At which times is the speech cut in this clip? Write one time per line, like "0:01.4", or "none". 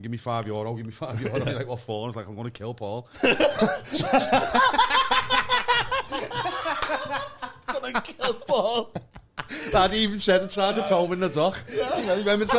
none

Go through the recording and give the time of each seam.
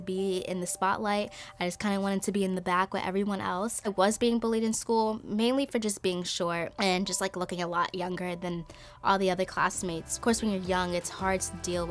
0:03.9
0:06.7
0:10.2

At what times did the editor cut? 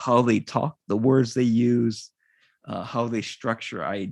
none

